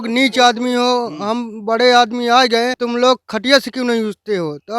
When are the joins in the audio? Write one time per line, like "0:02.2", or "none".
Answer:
0:02.8